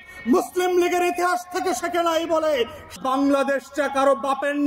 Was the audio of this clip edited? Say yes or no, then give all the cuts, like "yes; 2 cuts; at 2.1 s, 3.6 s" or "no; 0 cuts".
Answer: yes; 1 cut; at 3.0 s